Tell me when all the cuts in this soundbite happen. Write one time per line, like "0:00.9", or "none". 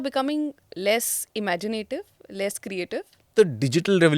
0:03.3